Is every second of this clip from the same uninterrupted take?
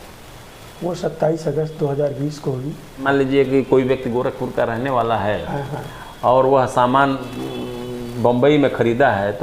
no; 1 cut; at 3.0 s

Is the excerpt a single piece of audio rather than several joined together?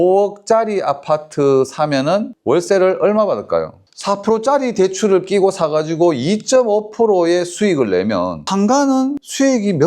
no; 2 cuts; at 3.9 s, 8.4 s

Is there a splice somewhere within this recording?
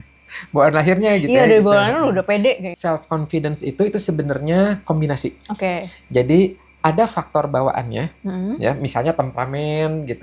yes; 1 cut; at 2.7 s

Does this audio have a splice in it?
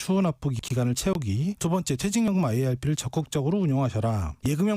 yes; 1 cut; at 1.6 s

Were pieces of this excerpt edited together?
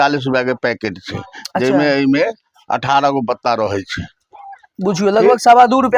no; 0 cuts

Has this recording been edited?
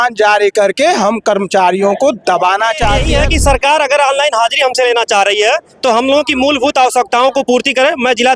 yes; 1 cut; at 3.0 s

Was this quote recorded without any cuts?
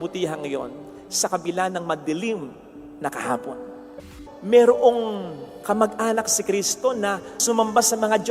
no; 2 cuts; at 4.1 s, 7.4 s

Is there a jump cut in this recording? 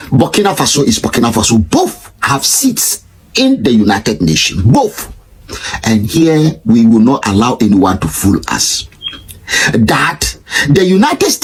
no; 0 cuts

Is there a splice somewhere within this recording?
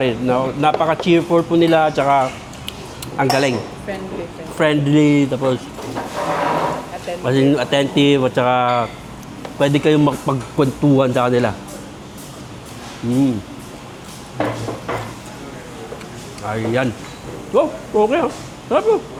no; 0 cuts

